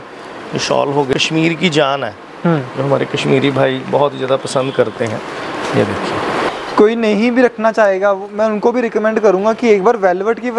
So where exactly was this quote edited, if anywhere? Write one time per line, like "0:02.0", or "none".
0:01.1
0:06.5

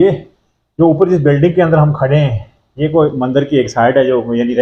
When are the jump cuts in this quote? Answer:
none

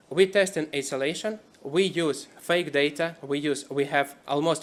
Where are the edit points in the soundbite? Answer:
none

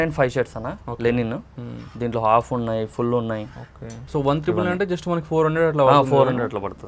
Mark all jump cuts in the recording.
none

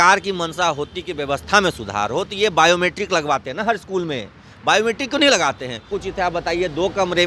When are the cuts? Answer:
0:06.0

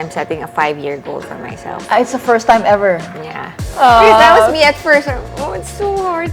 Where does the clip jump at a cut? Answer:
0:03.7

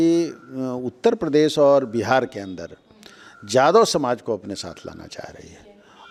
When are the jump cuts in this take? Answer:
none

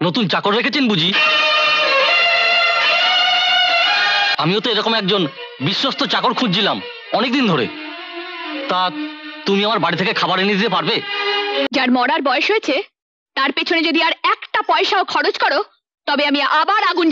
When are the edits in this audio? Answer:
0:04.3
0:11.7

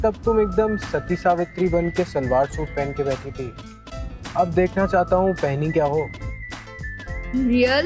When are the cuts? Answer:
none

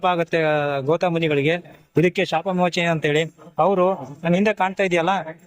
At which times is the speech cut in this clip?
0:01.8

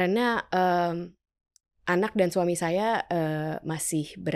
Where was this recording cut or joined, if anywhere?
none

